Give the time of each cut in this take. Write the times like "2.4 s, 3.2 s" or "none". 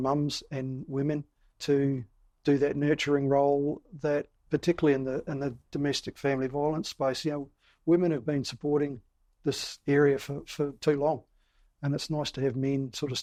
none